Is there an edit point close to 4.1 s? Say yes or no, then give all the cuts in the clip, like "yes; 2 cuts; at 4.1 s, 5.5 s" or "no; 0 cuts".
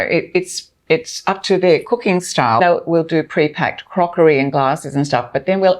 no; 1 cut; at 2.6 s